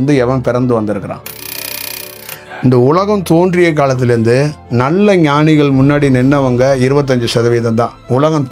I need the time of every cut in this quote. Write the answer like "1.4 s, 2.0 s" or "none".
1.8 s